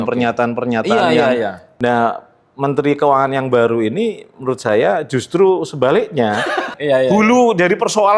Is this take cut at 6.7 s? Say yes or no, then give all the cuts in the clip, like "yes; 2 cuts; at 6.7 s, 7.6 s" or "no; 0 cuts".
yes; 2 cuts; at 1.6 s, 6.7 s